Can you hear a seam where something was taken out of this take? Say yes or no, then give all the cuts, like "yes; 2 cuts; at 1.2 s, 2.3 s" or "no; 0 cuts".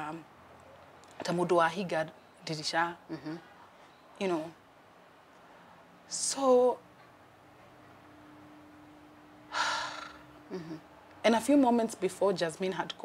no; 0 cuts